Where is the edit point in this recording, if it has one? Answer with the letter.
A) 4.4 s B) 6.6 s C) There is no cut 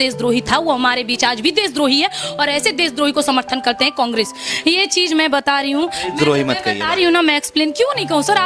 A